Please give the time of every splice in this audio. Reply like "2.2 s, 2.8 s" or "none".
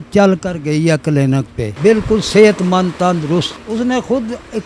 1.6 s, 3.6 s